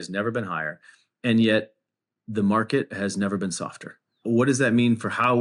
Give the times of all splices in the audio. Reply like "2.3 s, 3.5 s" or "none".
4.1 s